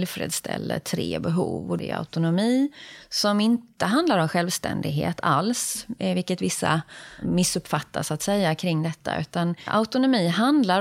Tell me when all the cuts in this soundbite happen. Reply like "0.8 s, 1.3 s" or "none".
1.8 s, 7.2 s, 9.7 s